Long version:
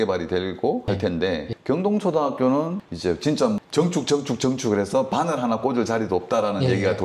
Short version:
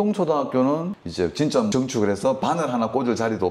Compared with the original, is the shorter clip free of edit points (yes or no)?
no